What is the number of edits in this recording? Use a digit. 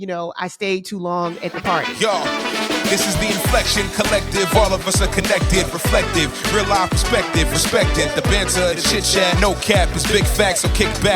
1